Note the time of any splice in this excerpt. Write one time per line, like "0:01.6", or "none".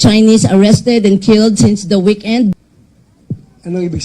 0:02.5